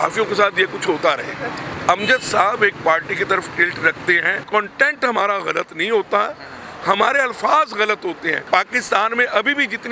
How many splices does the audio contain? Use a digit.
3